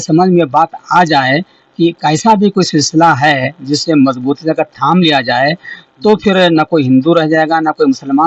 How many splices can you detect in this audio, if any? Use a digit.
0